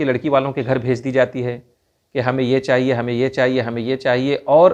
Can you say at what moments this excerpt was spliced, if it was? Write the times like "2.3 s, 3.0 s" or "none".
none